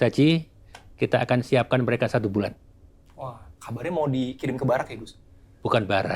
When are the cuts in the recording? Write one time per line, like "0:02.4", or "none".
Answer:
none